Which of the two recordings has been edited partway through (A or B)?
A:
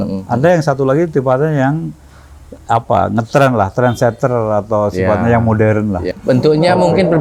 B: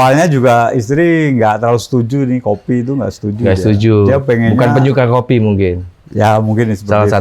A